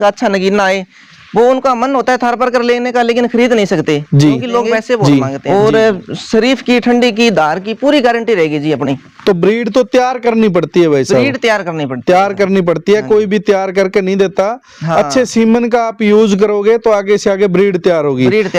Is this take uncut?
no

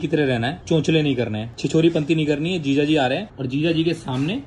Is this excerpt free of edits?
no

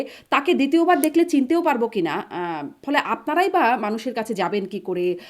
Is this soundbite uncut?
yes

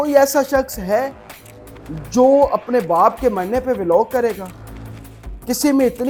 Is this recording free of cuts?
yes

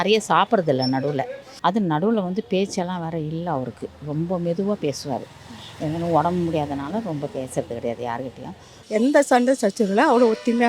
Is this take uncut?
no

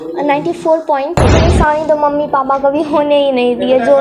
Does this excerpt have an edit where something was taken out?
yes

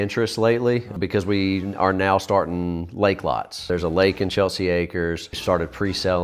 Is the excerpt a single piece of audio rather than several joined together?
no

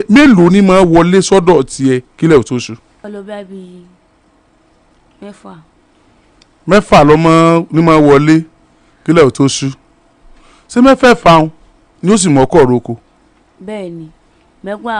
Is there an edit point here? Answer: yes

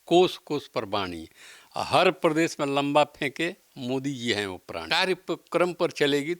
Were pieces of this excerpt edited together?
yes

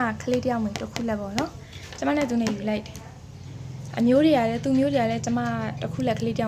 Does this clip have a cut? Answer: no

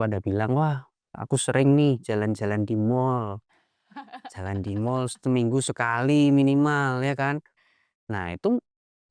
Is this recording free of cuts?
yes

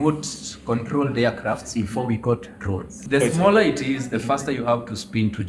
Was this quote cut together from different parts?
yes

